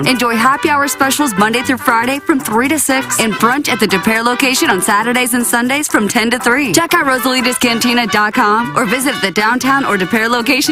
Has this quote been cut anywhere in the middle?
no; 0 cuts

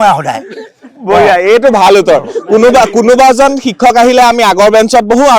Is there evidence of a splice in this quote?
no; 0 cuts

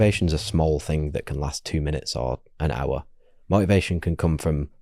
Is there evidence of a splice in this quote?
no; 0 cuts

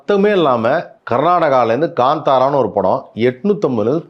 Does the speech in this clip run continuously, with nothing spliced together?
no; 1 cut; at 1.0 s

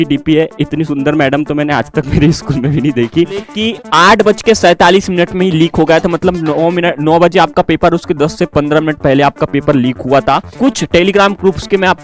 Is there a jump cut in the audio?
yes; 2 cuts; at 3.6 s, 10.5 s

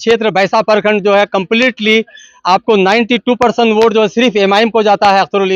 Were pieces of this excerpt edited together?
no; 0 cuts

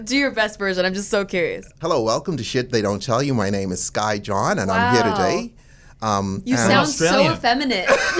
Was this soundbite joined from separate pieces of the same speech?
yes; 1 cut; at 1.6 s

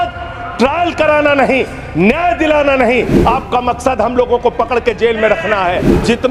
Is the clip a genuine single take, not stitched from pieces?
yes; 0 cuts

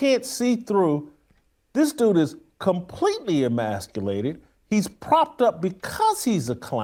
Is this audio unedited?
yes; 0 cuts

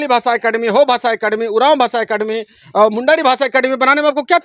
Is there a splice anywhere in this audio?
no; 0 cuts

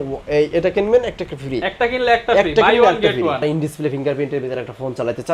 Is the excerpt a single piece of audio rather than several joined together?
no; 1 cut; at 3.4 s

